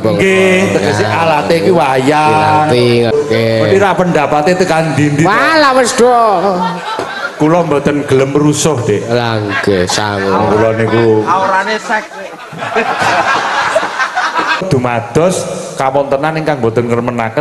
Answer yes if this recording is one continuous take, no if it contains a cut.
no